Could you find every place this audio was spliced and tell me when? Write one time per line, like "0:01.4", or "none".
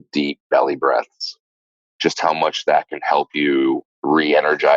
0:01.7
0:03.9